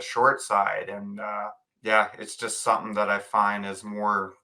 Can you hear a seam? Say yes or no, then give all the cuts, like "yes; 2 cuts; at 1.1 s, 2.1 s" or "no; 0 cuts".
yes; 1 cut; at 1.6 s